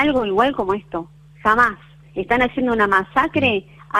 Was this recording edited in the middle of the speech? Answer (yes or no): no